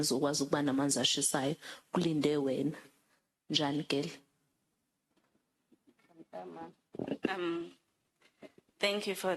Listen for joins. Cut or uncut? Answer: uncut